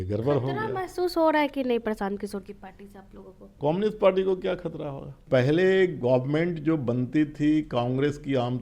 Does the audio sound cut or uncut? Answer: cut